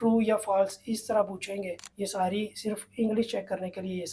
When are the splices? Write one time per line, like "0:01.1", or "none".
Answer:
0:01.8